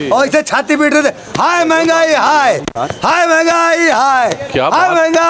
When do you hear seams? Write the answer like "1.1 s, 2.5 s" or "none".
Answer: none